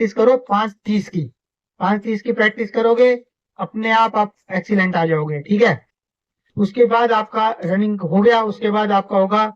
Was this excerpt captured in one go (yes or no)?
yes